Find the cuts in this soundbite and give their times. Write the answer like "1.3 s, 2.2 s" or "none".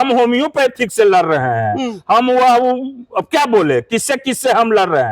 none